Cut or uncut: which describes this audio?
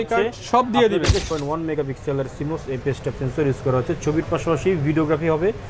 cut